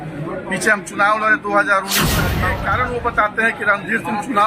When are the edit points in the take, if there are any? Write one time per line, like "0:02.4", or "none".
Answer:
0:02.4